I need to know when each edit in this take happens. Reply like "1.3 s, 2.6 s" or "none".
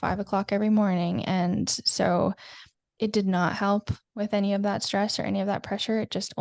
none